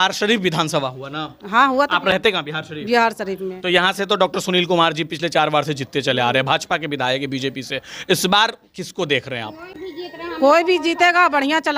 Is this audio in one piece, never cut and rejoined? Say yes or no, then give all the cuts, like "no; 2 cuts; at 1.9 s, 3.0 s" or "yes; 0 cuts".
yes; 0 cuts